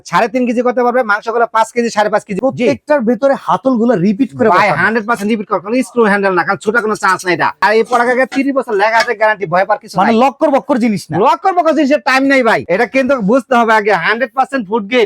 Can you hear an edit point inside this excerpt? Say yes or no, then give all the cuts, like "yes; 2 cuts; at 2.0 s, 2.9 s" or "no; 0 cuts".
yes; 3 cuts; at 2.3 s, 7.6 s, 12.6 s